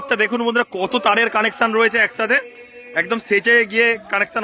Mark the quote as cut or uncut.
uncut